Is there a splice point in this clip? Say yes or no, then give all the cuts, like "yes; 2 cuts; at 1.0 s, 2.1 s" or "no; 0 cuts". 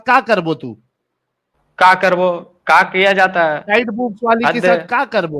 no; 0 cuts